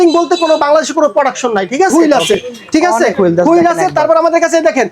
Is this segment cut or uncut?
cut